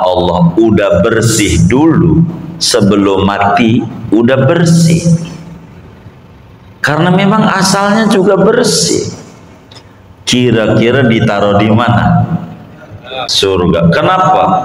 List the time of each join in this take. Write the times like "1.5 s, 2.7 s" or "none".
13.2 s